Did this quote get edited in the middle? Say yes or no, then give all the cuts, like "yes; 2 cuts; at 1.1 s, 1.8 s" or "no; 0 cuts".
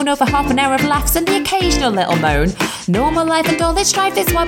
no; 0 cuts